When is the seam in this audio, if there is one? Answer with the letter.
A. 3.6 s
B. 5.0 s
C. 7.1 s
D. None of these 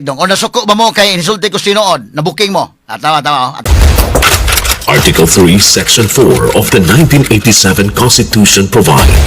A